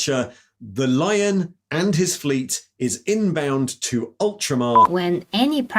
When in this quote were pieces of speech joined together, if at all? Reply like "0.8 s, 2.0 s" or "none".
4.8 s